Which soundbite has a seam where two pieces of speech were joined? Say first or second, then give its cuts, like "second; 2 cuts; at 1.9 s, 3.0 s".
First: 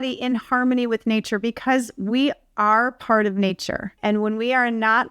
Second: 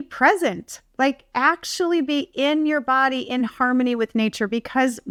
first; 1 cut; at 3.9 s